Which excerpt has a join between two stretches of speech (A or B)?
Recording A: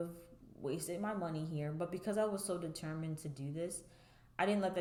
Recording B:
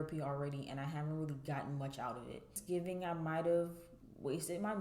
B